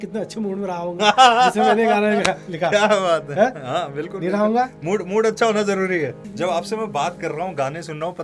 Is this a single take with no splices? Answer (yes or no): no